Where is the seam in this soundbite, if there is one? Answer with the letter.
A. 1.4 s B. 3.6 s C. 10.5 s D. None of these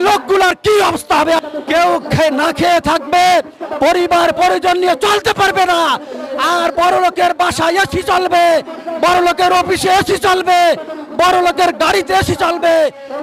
A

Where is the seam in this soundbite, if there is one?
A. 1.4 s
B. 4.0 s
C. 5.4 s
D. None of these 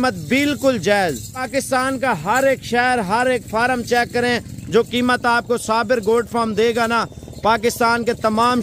A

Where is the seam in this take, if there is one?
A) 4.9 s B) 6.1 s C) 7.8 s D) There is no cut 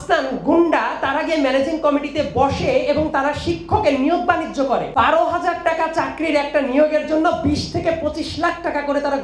A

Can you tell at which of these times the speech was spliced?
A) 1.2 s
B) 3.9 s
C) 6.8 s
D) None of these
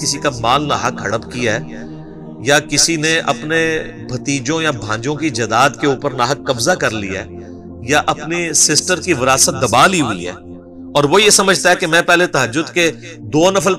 D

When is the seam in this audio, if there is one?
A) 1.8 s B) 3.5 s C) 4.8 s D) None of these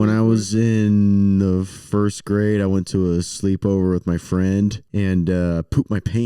C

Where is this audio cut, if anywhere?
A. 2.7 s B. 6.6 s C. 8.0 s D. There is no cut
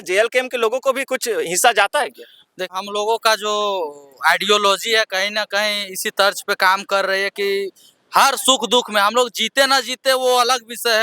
A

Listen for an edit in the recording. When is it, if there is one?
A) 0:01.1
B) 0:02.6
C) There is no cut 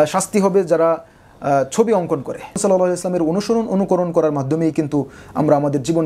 B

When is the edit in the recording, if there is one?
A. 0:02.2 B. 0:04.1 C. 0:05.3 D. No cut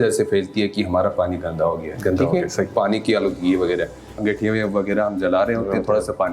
B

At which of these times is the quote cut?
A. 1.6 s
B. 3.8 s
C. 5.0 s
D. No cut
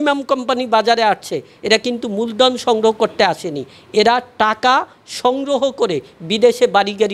D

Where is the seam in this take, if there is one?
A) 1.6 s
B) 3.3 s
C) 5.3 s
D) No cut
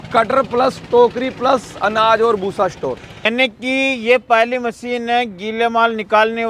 B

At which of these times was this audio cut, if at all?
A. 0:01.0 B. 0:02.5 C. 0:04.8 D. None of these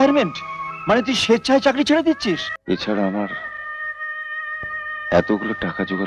B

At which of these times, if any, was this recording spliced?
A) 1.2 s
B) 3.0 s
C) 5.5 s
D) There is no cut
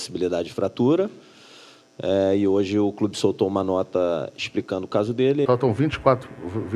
C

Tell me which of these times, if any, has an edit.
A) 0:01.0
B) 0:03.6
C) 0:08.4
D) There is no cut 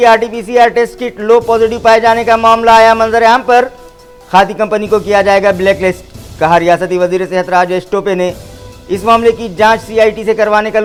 D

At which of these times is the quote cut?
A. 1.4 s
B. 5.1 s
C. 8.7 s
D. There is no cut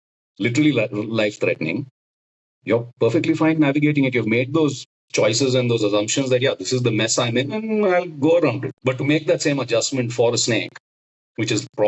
C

